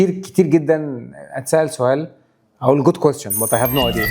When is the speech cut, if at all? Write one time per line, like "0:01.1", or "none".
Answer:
none